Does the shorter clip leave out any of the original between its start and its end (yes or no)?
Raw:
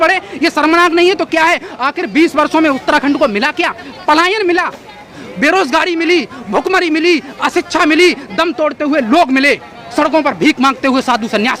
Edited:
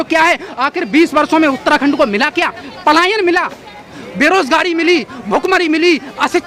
no